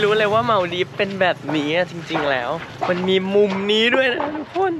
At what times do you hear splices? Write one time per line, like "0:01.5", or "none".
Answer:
0:02.7